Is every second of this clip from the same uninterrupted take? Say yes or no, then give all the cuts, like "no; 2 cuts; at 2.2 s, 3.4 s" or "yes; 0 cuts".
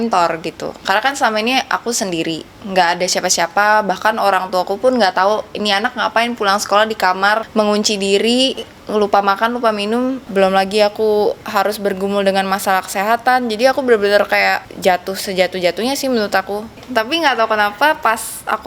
no; 4 cuts; at 7.5 s, 10.2 s, 14.7 s, 16.8 s